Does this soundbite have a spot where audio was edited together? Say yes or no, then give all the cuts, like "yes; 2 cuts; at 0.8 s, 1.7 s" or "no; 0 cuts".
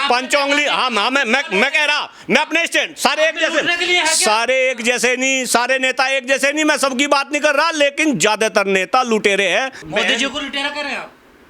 yes; 1 cut; at 9.9 s